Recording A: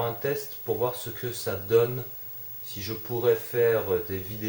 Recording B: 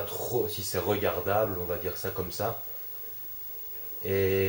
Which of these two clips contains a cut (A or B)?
B